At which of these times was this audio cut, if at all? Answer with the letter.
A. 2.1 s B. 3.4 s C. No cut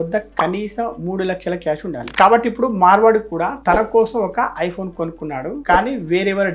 A